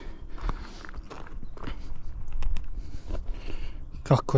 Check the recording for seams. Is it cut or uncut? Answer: uncut